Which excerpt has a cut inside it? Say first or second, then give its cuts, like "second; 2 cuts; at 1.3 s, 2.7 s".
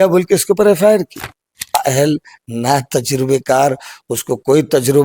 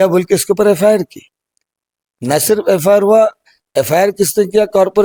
first; 1 cut; at 1.7 s